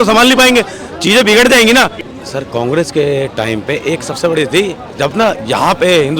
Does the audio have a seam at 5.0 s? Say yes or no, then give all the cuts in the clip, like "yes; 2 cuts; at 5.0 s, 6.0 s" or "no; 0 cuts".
no; 1 cut; at 2.0 s